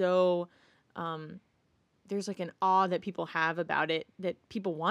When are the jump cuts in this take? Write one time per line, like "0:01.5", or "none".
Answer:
none